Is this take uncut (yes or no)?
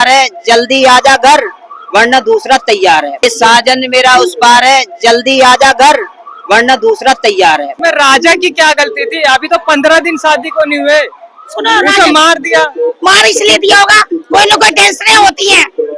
no